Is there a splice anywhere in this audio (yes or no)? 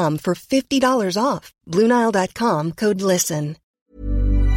yes